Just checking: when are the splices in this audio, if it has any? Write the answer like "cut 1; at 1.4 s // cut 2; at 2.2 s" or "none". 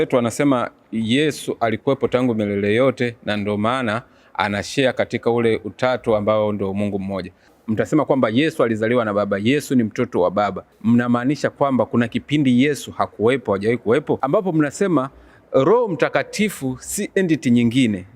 cut 1; at 7.5 s // cut 2; at 10.7 s // cut 3; at 14.2 s